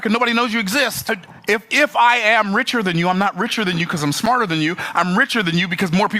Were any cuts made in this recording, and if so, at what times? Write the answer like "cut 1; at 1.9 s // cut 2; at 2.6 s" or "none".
cut 1; at 1.1 s